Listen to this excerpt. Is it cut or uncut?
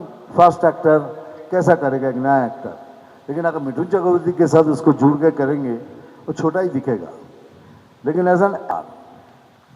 cut